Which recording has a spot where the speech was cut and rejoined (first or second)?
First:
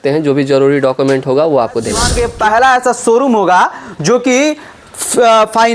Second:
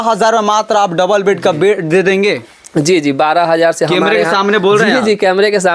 first